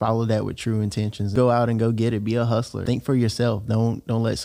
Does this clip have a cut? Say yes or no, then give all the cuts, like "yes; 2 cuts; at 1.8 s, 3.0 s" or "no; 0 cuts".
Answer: yes; 2 cuts; at 1.3 s, 2.8 s